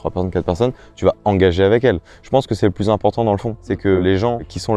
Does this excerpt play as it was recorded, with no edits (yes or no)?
no